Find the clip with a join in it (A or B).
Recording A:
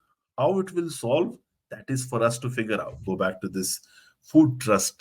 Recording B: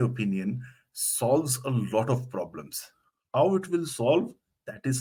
A